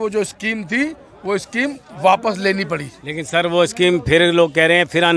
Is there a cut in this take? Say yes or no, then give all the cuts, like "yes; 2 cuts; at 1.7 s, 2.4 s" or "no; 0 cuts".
no; 0 cuts